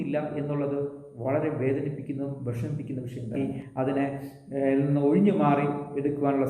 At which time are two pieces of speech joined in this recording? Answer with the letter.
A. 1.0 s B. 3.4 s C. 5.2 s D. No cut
B